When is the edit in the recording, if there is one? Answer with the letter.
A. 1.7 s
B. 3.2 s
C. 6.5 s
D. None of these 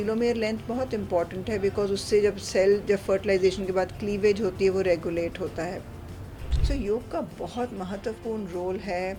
C